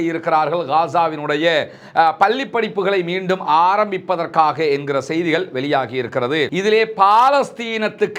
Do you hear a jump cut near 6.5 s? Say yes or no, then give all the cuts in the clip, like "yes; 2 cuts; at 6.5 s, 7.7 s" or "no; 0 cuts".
yes; 1 cut; at 6.5 s